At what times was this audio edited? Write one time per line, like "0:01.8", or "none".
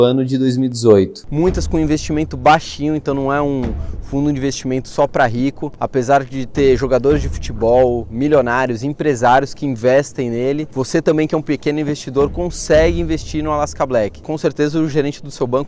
0:01.2
0:14.2